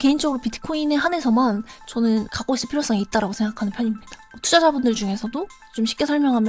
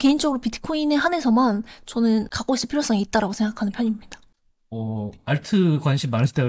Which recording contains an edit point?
first; 1 cut; at 4.4 s

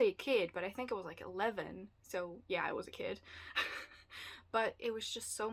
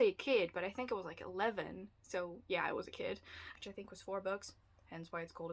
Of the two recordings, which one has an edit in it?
second; 1 cut; at 3.6 s

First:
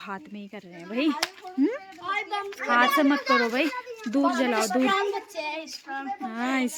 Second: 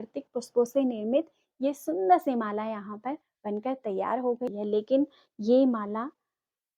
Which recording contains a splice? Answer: second; 1 cut; at 4.5 s

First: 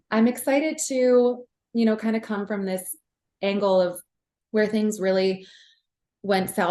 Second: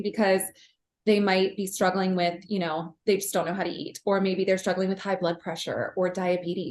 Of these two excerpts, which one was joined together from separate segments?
first; 1 cut; at 4.0 s

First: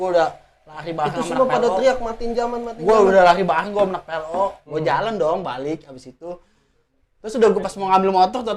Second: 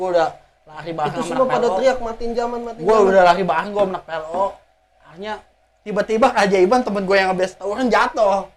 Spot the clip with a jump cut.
first; 1 cut; at 4.6 s

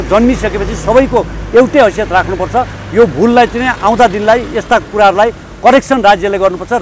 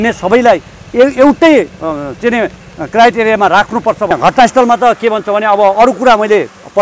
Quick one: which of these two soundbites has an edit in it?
second; 1 cut; at 4.1 s

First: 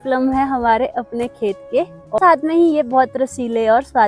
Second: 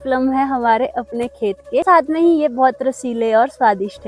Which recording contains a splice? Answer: second; 1 cut; at 1.8 s

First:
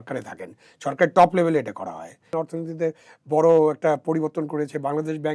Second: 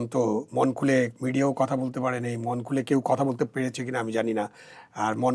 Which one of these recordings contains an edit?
first; 1 cut; at 2.3 s

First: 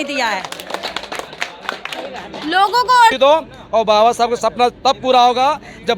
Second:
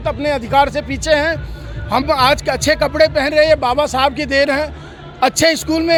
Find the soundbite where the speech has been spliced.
first; 1 cut; at 3.1 s

